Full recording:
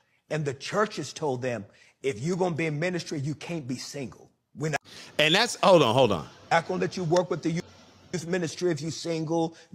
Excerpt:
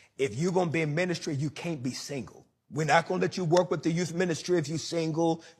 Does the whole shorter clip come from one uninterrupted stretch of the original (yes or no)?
no